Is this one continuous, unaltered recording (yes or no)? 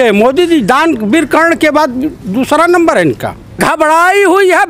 no